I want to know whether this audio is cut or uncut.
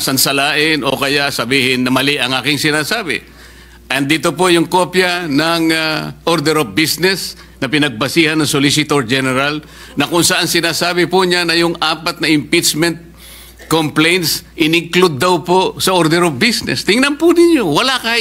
uncut